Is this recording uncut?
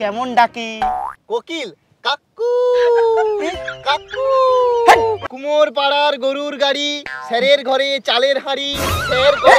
no; 1 cut; at 5.2 s

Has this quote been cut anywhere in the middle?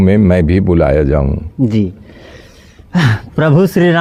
no; 0 cuts

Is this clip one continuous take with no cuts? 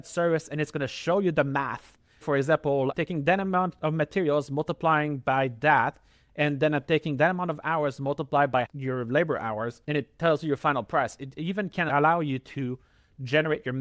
no; 4 cuts; at 2.2 s, 8.7 s, 9.8 s, 11.9 s

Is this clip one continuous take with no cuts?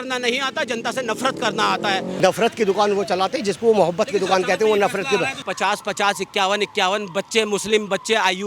no; 2 cuts; at 2.1 s, 5.4 s

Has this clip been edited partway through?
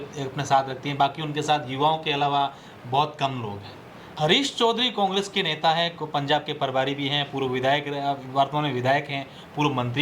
yes; 1 cut; at 4.1 s

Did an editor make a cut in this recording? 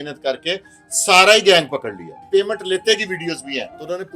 yes; 1 cut; at 2.2 s

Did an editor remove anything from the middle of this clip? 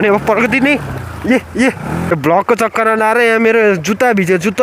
yes; 1 cut; at 2.1 s

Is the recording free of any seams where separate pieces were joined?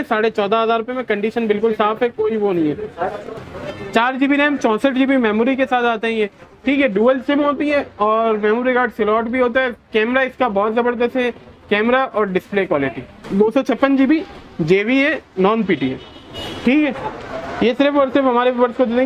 no; 2 cuts; at 3.4 s, 13.2 s

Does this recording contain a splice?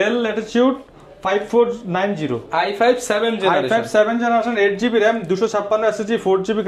no; 0 cuts

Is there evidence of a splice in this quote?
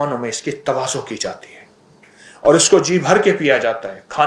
no; 0 cuts

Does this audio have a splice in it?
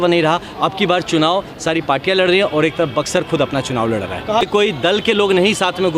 yes; 1 cut; at 4.4 s

